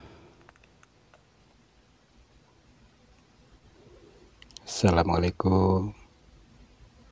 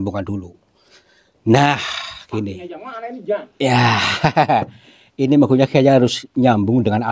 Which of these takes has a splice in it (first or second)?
first